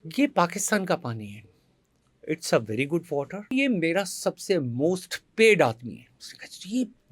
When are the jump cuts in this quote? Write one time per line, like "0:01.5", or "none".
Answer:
0:03.5